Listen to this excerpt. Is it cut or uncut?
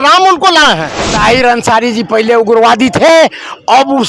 cut